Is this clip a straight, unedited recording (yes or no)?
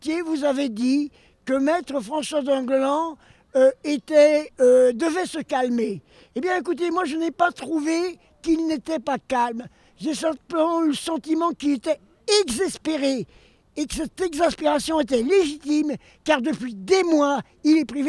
yes